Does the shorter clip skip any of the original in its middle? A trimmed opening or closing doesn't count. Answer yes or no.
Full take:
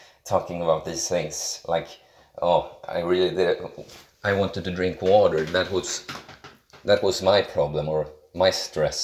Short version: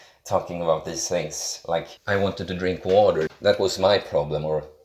yes